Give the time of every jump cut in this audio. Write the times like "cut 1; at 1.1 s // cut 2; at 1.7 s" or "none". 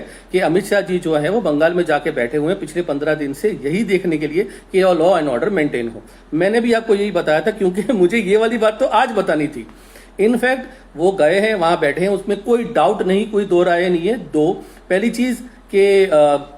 none